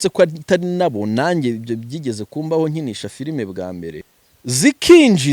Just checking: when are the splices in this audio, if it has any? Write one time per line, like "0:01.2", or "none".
0:04.1